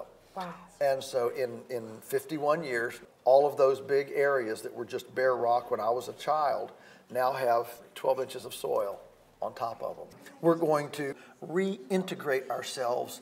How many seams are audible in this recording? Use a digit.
3